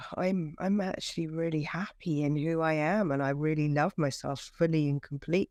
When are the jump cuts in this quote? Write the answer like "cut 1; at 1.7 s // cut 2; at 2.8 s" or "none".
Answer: none